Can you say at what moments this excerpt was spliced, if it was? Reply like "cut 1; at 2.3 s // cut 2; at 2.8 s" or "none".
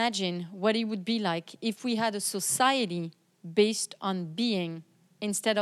none